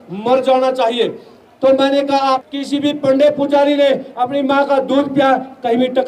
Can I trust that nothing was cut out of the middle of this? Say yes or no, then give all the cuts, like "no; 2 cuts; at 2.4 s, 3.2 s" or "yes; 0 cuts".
no; 1 cut; at 2.4 s